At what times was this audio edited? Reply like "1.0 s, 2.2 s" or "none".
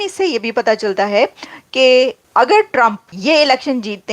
2.2 s, 3.1 s

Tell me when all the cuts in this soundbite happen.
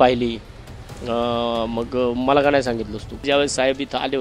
3.2 s

